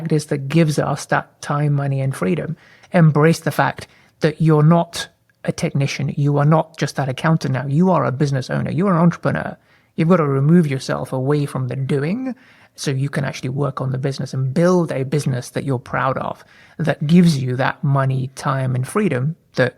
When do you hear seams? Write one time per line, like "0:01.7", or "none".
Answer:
0:02.7